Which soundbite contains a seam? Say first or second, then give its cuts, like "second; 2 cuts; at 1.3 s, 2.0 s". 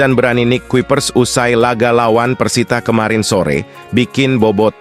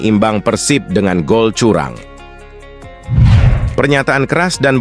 second; 2 cuts; at 2.5 s, 3.6 s